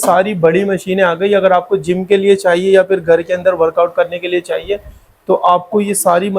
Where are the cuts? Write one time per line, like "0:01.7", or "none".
none